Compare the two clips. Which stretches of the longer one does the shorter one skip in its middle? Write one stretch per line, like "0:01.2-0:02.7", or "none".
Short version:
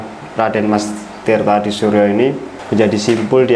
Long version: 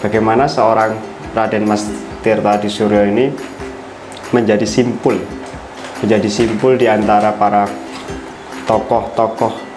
0:03.5-0:05.8